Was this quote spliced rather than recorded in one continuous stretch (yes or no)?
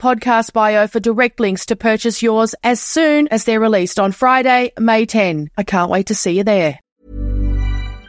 yes